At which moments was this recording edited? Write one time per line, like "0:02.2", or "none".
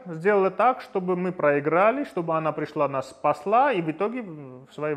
none

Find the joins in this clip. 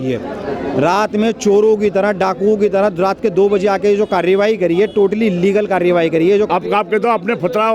0:06.5

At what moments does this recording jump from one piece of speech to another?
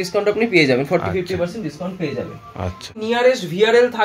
0:03.0

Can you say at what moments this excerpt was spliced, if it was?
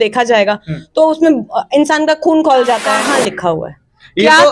0:02.9

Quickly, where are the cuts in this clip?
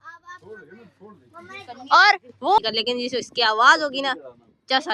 0:02.6

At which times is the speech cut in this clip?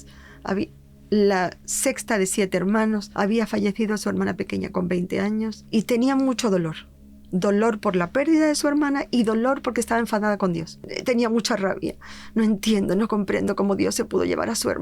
0:05.6
0:10.8

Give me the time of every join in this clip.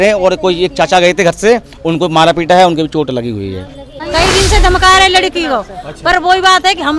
0:03.9

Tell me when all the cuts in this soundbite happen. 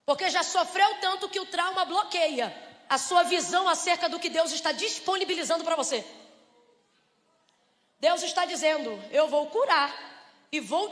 none

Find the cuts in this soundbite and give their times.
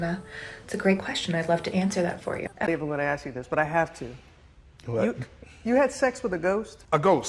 0:02.7

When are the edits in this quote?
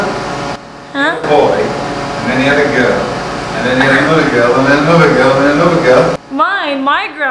0:06.2

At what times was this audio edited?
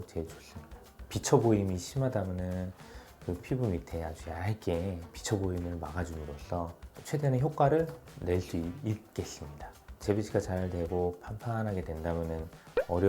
0:00.9
0:06.9
0:09.9

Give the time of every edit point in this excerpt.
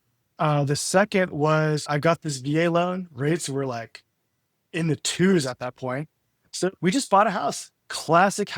0:01.8

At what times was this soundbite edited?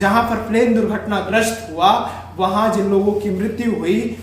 none

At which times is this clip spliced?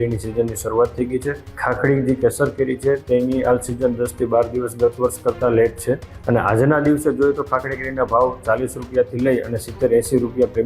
0:01.5
0:06.1

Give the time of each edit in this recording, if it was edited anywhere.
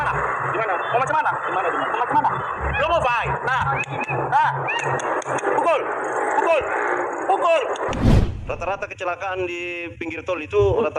0:08.0

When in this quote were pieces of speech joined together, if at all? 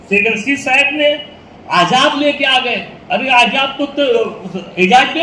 none

